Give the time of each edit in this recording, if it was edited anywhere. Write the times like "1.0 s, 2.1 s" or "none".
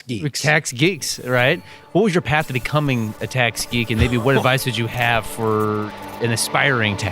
6.1 s

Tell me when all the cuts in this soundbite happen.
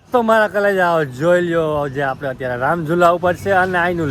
none

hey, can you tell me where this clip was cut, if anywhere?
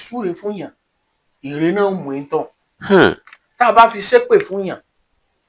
none

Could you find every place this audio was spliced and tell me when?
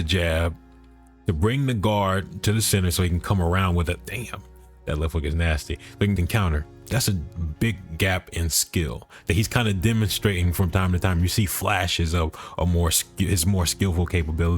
6.2 s

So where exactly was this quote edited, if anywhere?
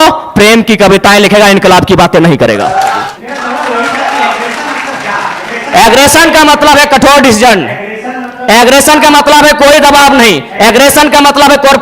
3.0 s

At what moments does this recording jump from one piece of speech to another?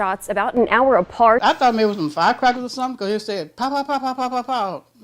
1.4 s

